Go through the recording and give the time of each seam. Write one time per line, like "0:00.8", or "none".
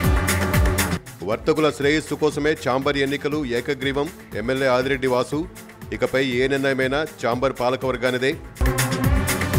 0:00.9